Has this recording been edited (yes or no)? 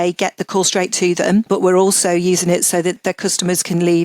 yes